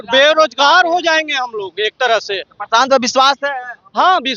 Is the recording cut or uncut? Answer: uncut